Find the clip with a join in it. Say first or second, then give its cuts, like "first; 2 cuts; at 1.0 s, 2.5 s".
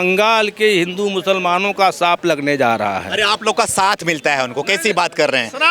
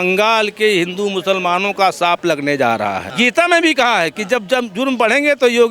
second; 1 cut; at 3.1 s